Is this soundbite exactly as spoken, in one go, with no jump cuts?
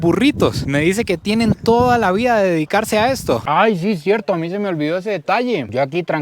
no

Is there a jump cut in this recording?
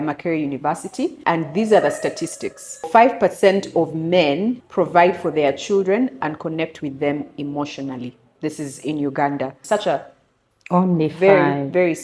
yes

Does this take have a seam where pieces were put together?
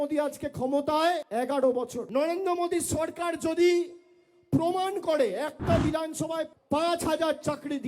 yes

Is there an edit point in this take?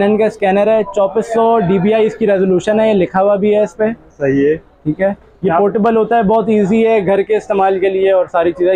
no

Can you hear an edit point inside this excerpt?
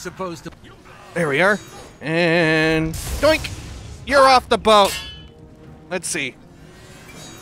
no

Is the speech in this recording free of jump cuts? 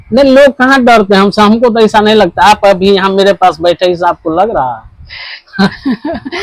yes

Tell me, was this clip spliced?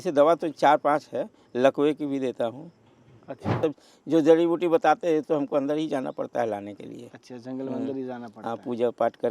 yes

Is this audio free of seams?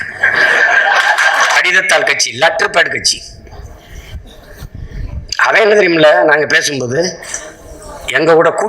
no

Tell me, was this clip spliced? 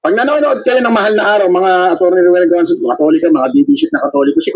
no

